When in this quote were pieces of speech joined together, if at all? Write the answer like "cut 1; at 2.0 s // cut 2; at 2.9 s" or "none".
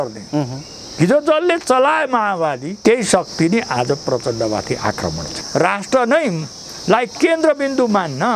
cut 1; at 2.7 s // cut 2; at 5.3 s